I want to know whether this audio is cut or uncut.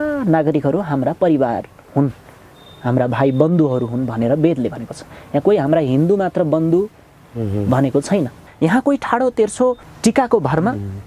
cut